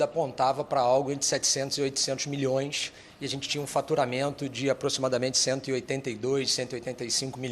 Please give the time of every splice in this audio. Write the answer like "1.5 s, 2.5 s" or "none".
none